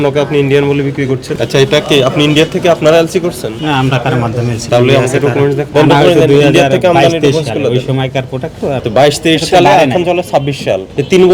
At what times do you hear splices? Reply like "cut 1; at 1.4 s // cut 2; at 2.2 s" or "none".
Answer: cut 1; at 1.3 s // cut 2; at 4.6 s // cut 3; at 5.6 s // cut 4; at 8.8 s